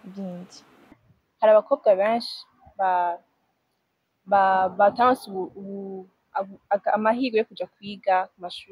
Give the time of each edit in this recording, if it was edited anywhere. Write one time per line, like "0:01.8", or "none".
0:01.1